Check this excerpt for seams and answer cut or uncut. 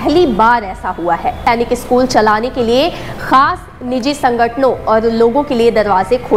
cut